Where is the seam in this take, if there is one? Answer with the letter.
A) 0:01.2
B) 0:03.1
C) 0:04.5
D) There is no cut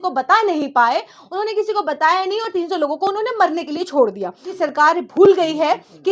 C